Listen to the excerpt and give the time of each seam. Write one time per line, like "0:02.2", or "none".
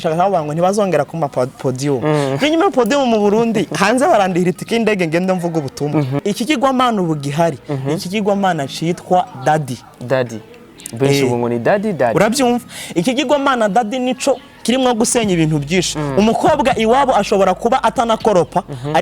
0:06.2